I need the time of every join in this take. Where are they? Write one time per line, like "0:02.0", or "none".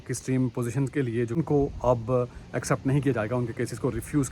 0:01.4